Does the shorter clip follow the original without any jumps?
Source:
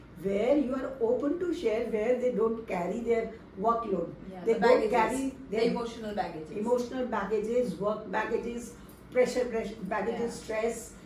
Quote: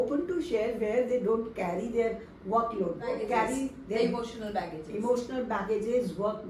no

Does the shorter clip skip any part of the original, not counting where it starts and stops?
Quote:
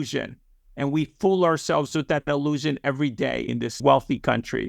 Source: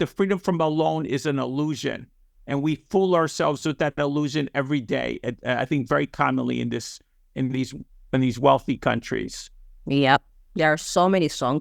yes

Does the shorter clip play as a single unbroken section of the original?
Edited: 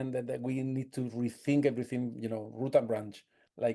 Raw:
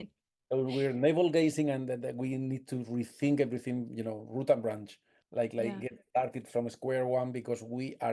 yes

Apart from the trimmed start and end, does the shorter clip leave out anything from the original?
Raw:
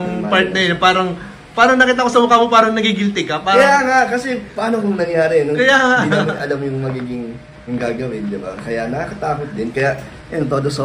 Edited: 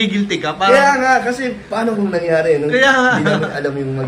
no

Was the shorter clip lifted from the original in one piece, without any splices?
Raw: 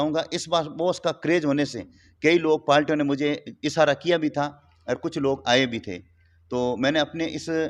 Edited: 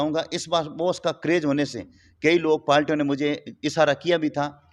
yes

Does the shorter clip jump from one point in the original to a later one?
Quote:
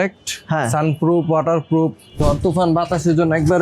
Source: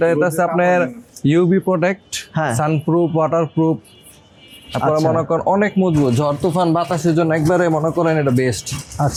yes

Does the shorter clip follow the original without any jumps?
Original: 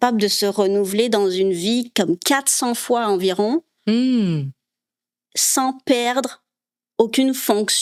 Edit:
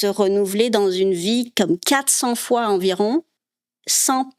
no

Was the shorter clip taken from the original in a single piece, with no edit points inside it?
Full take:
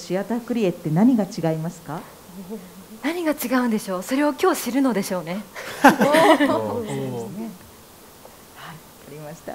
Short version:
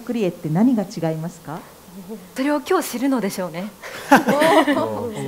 no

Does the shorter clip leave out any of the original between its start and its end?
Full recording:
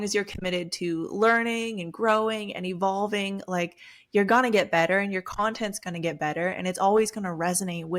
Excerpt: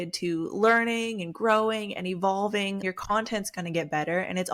yes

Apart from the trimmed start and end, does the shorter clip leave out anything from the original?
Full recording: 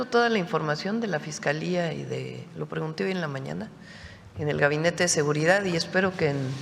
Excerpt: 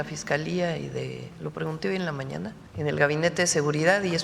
yes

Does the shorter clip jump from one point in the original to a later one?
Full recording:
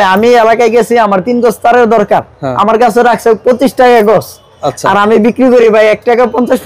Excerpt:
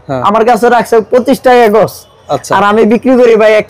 no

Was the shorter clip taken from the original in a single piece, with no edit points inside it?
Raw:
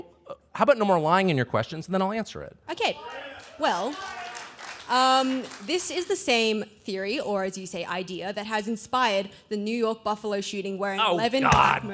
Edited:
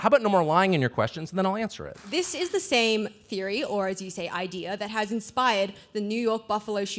no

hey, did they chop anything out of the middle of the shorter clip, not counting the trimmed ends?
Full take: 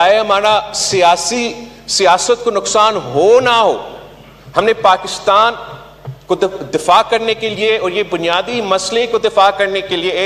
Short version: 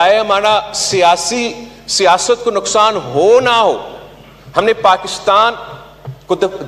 no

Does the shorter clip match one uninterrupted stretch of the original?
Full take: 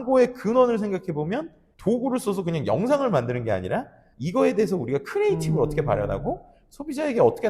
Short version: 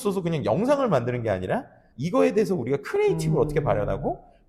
yes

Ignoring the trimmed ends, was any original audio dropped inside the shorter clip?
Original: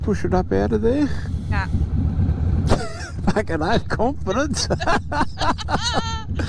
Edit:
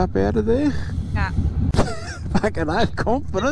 yes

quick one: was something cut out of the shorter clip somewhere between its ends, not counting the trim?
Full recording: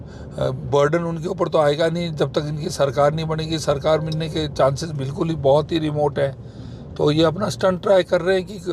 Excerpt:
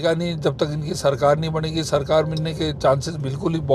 no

